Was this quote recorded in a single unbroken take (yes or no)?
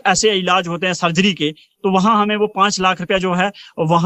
yes